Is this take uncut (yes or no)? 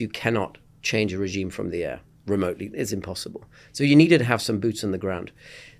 yes